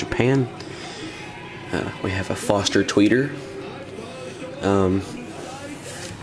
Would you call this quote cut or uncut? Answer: uncut